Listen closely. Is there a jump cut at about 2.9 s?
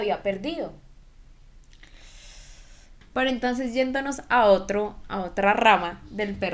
yes; 1 cut; at 2.9 s

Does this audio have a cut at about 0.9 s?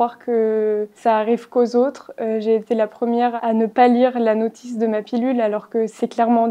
yes; 2 cuts; at 0.9 s, 3.3 s

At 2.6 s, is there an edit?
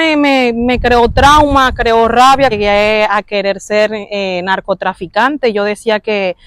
yes; 1 cut; at 2.6 s

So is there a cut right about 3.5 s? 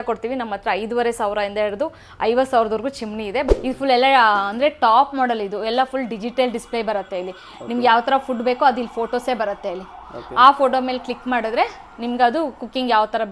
yes; 1 cut; at 3.5 s

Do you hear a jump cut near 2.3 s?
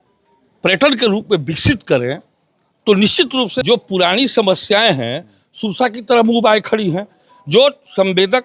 no; 1 cut; at 3.5 s

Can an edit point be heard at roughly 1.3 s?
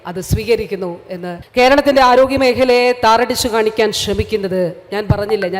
yes; 1 cut; at 1.3 s

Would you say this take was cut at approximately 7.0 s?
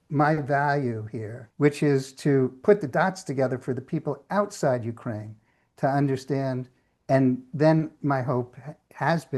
no; 1 cut; at 1.4 s

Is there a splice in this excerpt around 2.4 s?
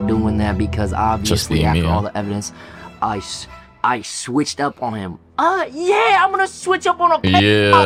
no; 0 cuts

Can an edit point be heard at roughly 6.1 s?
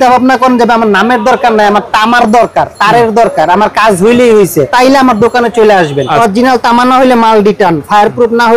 yes; 2 cuts; at 4.7 s, 6.1 s

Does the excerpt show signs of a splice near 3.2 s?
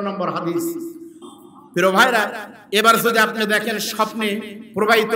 no; 1 cut; at 1.2 s

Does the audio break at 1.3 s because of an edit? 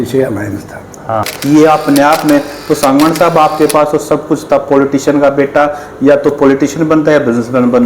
yes; 1 cut; at 1.3 s

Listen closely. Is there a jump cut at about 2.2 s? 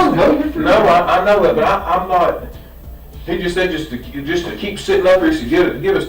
no; 0 cuts

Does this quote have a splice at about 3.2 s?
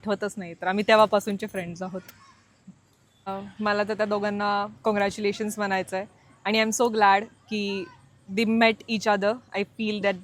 yes; 1 cut; at 3.2 s

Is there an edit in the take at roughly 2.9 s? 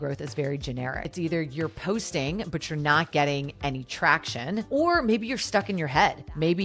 no; 1 cut; at 1.1 s

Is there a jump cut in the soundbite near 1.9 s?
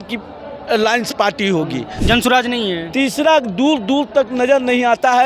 yes; 1 cut; at 1.9 s

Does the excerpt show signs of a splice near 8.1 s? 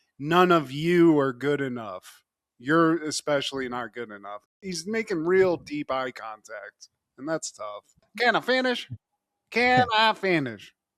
yes; 1 cut; at 8.1 s

